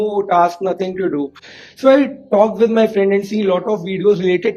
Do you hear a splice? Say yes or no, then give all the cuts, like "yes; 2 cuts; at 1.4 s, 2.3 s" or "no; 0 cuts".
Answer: no; 0 cuts